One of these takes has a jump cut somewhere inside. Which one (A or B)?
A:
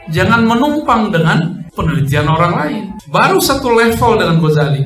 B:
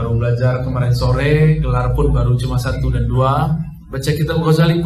A